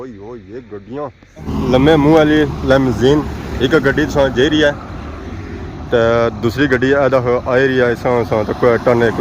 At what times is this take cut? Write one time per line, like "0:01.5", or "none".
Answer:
0:01.5